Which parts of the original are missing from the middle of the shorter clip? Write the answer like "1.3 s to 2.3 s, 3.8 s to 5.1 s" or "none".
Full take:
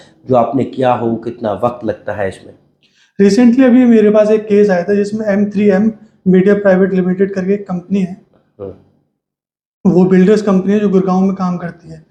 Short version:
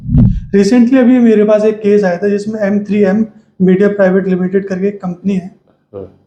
none